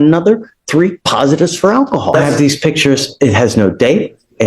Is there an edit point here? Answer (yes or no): yes